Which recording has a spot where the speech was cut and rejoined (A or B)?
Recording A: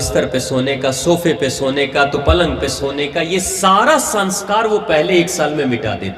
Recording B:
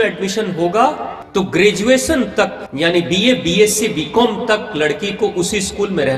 B